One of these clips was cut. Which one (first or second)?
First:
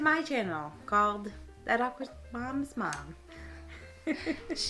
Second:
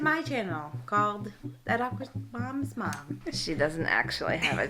second